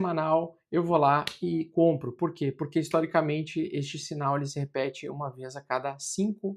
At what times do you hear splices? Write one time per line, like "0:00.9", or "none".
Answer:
none